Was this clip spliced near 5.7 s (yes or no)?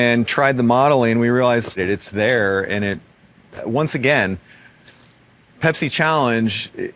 no